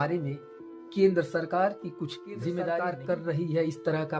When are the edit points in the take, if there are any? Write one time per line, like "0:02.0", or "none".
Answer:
0:02.9